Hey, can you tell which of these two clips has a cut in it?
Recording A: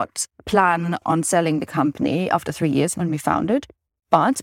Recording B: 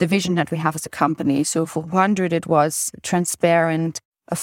A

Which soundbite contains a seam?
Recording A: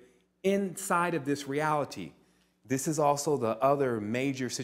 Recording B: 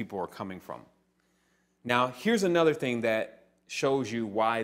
A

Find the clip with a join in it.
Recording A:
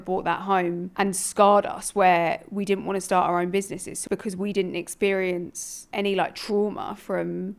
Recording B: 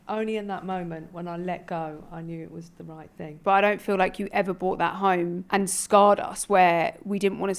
B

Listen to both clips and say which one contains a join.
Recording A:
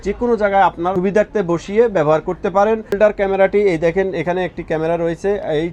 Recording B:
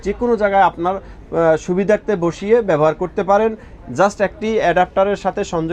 A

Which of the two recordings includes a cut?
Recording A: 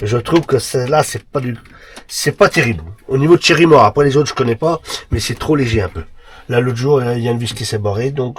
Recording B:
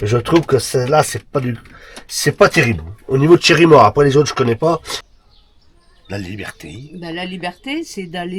B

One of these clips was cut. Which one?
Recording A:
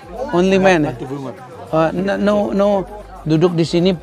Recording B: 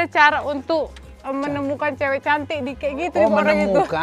A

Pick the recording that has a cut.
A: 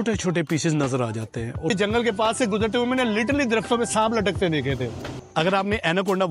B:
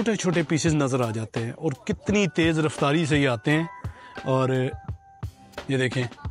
A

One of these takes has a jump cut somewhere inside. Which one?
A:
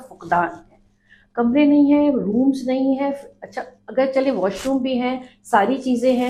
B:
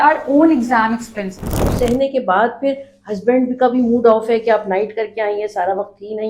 B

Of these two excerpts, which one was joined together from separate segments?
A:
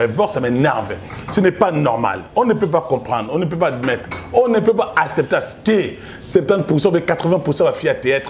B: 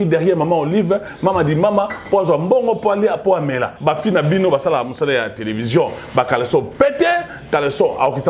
B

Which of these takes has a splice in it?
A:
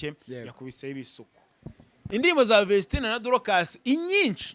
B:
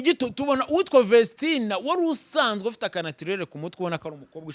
A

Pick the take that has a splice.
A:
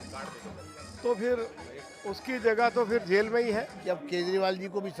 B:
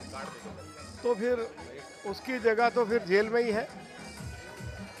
A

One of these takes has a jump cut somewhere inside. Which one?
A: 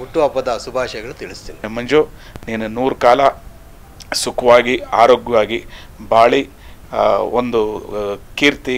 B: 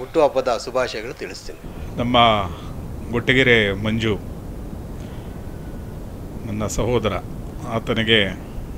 A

